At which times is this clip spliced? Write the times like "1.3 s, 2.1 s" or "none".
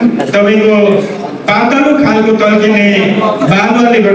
none